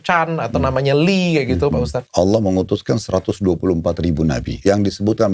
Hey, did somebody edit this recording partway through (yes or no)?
yes